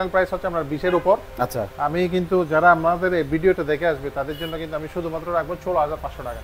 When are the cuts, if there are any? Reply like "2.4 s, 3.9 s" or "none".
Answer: none